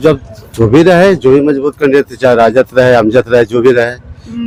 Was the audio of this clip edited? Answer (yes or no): no